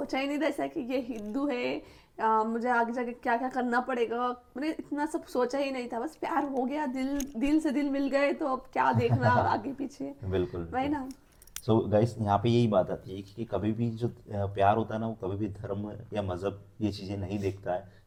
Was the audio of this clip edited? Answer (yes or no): no